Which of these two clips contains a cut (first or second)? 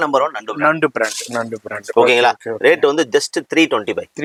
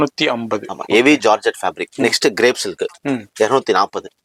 second